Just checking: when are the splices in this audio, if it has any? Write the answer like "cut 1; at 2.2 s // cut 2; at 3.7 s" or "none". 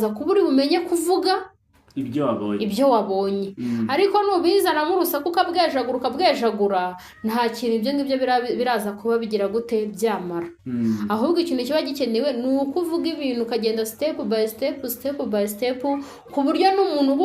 none